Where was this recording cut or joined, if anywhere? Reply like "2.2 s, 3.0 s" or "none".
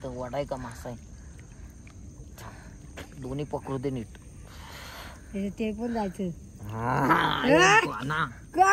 none